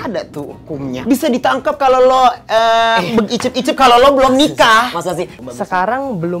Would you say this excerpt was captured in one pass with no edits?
no; 2 cuts; at 1.0 s, 5.3 s

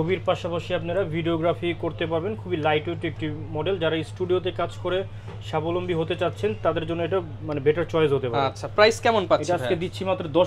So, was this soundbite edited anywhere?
no; 0 cuts

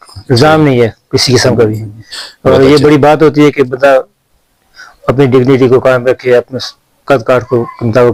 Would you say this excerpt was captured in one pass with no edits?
yes; 0 cuts

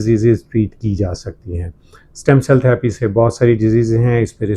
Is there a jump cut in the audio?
no; 0 cuts

